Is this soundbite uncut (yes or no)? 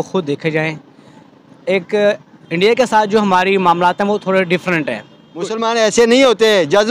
no